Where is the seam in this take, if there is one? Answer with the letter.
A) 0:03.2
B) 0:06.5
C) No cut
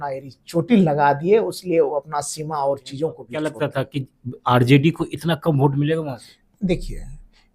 A